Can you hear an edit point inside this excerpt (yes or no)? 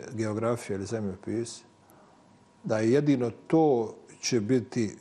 no